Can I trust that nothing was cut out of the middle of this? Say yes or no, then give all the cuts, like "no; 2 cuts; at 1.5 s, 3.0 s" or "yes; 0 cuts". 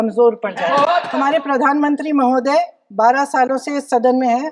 no; 1 cut; at 1.1 s